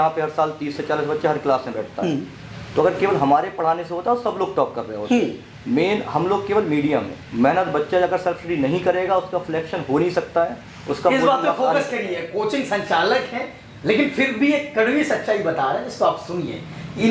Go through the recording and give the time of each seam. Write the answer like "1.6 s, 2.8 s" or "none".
none

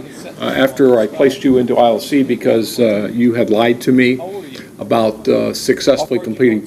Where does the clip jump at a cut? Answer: none

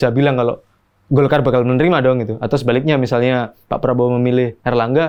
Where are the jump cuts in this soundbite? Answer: none

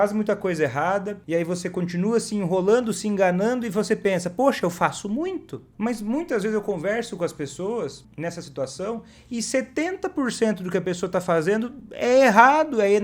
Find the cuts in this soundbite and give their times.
1.2 s, 5.6 s, 8.0 s

